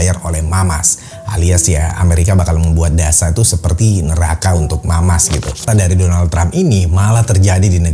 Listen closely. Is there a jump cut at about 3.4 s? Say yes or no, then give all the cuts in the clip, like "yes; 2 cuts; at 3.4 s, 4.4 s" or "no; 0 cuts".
no; 1 cut; at 5.6 s